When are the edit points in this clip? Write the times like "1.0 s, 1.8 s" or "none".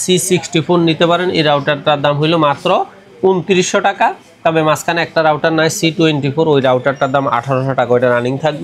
none